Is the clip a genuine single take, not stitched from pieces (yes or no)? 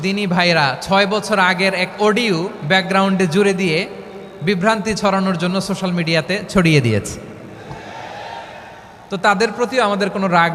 yes